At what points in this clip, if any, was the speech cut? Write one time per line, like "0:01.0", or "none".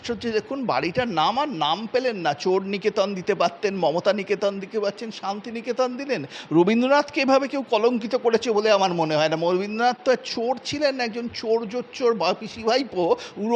none